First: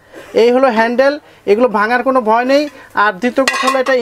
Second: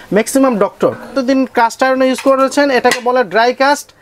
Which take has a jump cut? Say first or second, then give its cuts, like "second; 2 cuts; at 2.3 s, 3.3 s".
second; 1 cut; at 1.1 s